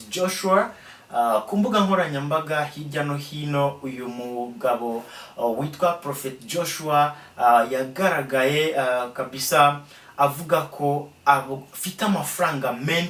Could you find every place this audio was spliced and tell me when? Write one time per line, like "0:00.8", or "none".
none